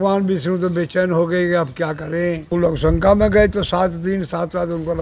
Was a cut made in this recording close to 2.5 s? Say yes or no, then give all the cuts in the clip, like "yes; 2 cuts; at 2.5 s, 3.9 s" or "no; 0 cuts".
yes; 1 cut; at 2.5 s